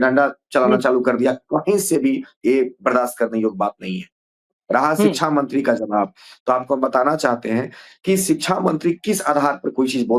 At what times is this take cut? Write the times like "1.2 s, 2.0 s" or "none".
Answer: none